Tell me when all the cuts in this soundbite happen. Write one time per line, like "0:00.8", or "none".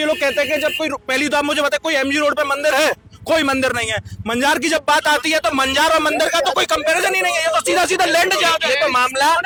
none